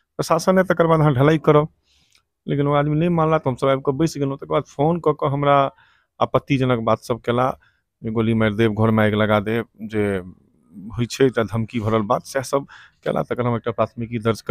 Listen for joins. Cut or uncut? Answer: uncut